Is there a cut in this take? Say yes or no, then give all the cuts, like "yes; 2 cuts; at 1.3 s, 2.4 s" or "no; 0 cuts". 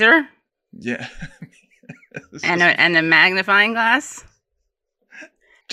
no; 0 cuts